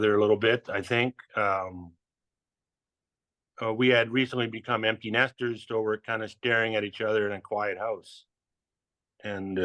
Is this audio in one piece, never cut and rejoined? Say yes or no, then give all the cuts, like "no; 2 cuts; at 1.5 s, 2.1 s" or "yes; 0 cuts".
yes; 0 cuts